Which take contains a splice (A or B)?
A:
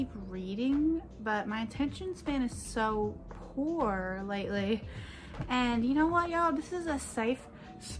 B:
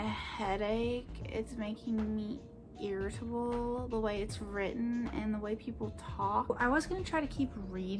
B